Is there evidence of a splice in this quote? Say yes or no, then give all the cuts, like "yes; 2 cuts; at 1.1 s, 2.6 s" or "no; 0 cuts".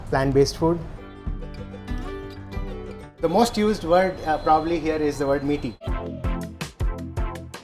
yes; 3 cuts; at 1.0 s, 3.0 s, 5.8 s